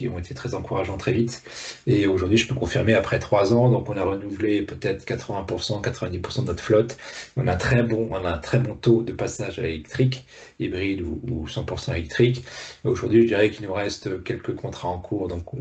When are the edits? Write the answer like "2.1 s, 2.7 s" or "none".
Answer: none